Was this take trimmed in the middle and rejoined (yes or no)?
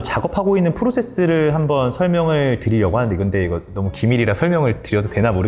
no